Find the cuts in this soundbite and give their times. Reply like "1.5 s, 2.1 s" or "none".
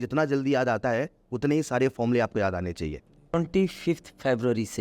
3.3 s